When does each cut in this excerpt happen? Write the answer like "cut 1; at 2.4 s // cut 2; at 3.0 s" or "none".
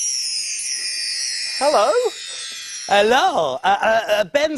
cut 1; at 3.0 s